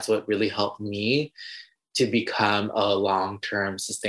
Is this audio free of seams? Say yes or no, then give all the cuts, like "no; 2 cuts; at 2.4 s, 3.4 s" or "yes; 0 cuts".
yes; 0 cuts